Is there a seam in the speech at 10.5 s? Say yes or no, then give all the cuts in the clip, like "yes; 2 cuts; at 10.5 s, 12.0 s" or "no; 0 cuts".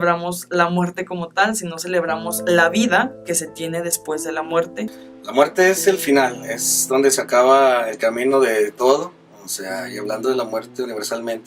no; 1 cut; at 6.7 s